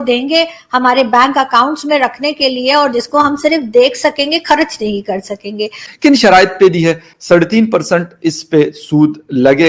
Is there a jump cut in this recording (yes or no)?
yes